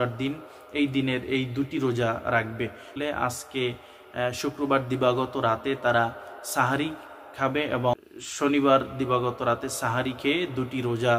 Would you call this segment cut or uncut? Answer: cut